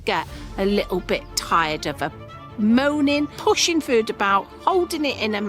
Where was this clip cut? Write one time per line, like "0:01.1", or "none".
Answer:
0:03.3